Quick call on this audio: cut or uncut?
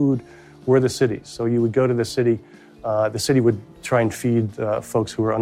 uncut